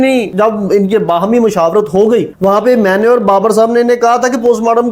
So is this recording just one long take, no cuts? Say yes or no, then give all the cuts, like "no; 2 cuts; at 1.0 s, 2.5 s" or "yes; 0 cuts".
yes; 0 cuts